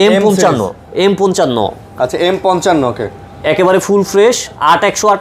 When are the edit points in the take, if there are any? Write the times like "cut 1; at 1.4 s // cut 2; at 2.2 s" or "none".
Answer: none